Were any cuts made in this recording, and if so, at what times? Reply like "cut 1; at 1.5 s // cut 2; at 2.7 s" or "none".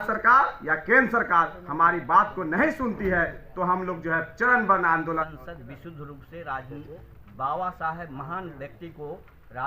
cut 1; at 5.2 s